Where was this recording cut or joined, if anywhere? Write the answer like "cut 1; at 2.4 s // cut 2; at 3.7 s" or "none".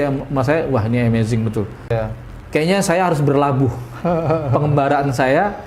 cut 1; at 1.9 s